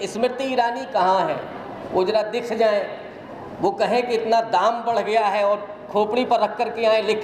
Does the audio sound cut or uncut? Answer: uncut